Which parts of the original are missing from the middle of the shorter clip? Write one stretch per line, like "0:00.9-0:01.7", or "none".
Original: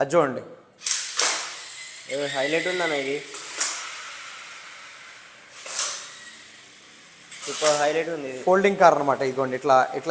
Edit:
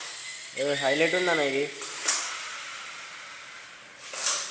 none